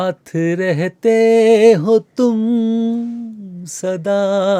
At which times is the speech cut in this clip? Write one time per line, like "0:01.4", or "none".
none